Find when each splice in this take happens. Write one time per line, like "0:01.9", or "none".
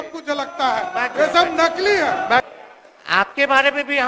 0:02.4